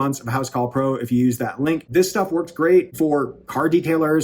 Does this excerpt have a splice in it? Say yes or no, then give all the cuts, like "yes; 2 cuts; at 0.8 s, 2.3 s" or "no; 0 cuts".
yes; 2 cuts; at 1.8 s, 2.9 s